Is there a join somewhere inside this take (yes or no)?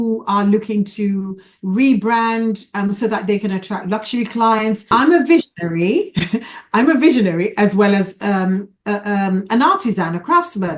yes